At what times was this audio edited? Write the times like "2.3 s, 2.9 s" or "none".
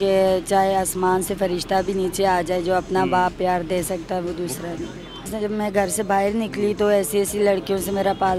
5.3 s